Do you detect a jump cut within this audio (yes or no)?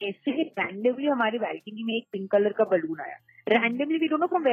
no